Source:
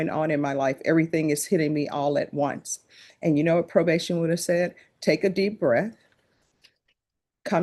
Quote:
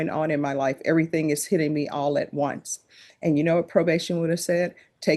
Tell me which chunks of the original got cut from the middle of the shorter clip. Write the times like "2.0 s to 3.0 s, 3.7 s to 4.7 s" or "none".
none